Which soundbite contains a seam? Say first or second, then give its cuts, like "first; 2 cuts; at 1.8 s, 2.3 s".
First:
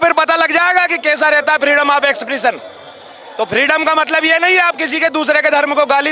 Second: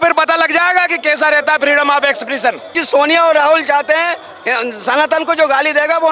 second; 1 cut; at 2.8 s